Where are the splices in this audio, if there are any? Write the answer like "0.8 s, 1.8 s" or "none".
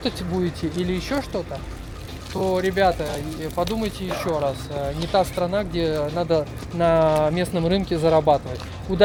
none